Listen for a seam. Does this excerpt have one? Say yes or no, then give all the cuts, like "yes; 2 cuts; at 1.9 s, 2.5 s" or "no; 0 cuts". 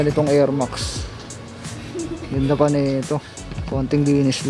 no; 0 cuts